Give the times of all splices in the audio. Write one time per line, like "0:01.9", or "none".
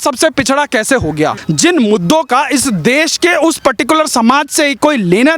0:01.4